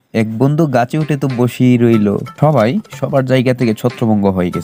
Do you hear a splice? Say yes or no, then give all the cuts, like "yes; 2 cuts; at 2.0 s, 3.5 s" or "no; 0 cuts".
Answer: no; 0 cuts